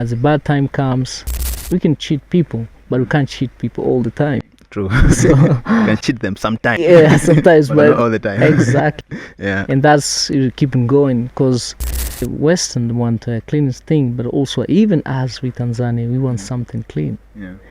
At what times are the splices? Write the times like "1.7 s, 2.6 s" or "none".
1.6 s, 12.2 s